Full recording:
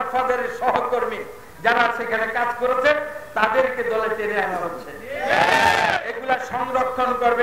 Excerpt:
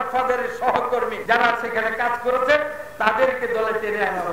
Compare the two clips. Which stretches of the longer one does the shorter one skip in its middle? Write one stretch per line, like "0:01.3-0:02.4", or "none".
0:01.2-0:01.5